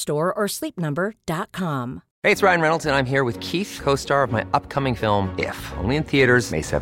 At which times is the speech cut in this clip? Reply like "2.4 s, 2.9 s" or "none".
2.1 s